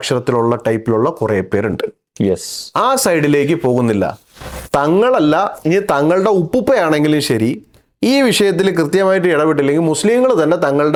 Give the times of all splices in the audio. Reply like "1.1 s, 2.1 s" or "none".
none